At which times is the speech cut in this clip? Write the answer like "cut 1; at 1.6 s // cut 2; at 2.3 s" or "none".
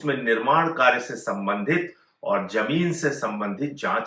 none